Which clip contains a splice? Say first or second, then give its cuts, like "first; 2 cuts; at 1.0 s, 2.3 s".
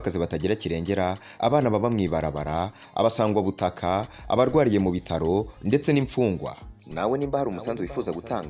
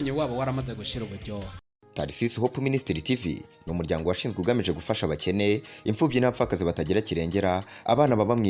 second; 1 cut; at 1.5 s